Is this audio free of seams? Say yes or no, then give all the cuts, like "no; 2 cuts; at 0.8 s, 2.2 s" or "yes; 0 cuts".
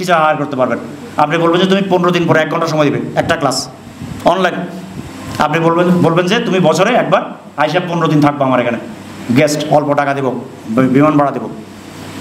yes; 0 cuts